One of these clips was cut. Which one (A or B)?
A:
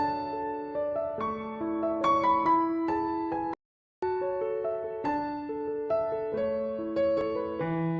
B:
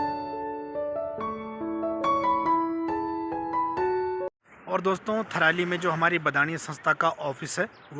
B